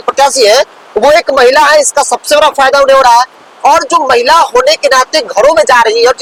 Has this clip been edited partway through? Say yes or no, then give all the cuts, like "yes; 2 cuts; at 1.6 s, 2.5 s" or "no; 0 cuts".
no; 0 cuts